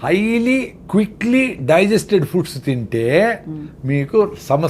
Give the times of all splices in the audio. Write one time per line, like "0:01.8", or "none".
none